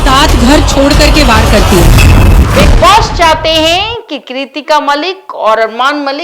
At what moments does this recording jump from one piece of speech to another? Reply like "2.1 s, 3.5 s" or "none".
2.4 s

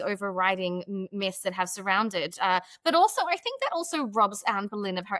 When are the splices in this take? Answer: none

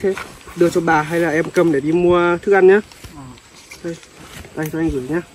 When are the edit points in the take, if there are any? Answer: none

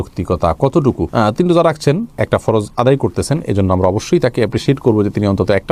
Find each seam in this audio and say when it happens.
none

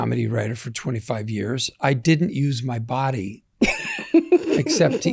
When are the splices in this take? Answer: none

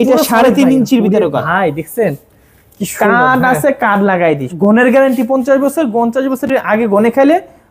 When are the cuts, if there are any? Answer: 4.5 s

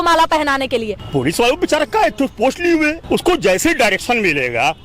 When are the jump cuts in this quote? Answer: 1.0 s, 3.0 s

